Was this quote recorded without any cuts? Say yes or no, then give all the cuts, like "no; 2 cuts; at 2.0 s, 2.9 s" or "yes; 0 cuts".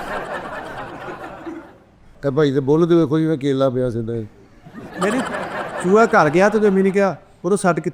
yes; 0 cuts